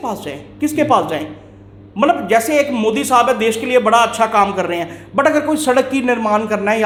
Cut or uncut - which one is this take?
uncut